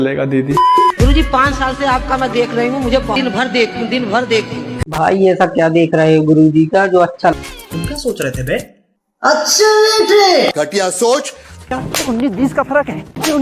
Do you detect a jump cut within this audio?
yes; 3 cuts; at 3.2 s, 7.3 s, 11.7 s

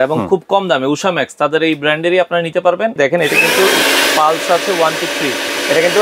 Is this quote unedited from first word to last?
no; 1 cut; at 3.0 s

